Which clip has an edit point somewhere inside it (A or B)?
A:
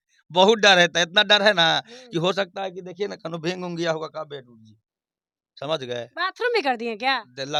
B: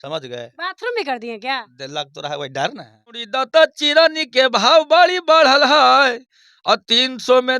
B